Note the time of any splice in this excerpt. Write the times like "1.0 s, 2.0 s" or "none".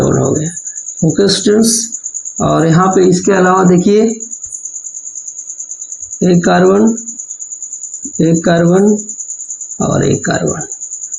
none